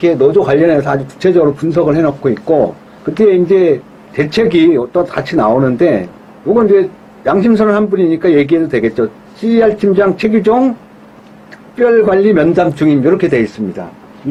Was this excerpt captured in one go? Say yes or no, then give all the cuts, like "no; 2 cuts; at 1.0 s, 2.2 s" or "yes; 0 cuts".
yes; 0 cuts